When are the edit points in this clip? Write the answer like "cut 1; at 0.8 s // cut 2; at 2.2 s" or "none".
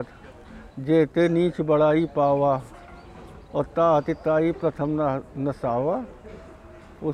none

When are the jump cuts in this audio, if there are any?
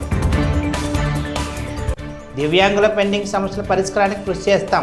cut 1; at 2.1 s

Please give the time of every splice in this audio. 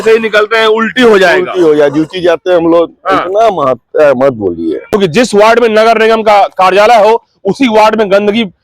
cut 1; at 4.9 s

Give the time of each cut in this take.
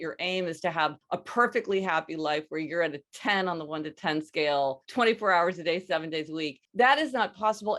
cut 1; at 1.0 s // cut 2; at 4.8 s // cut 3; at 6.6 s

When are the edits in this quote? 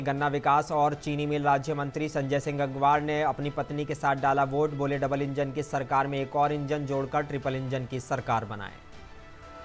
none

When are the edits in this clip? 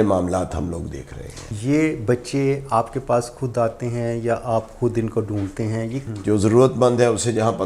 cut 1; at 1.5 s // cut 2; at 6.0 s

